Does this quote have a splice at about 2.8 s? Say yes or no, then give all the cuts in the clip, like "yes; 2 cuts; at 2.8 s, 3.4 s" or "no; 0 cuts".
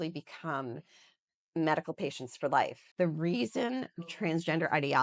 yes; 1 cut; at 2.8 s